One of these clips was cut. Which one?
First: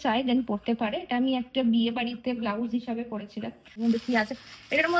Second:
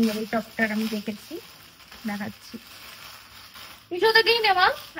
first; 1 cut; at 3.8 s

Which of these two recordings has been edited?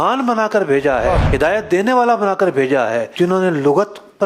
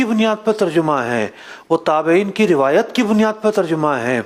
first; 2 cuts; at 1.3 s, 3.1 s

